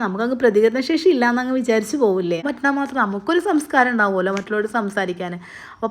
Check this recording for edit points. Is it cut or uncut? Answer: cut